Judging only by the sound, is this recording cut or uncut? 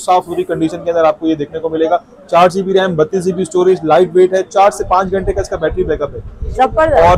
uncut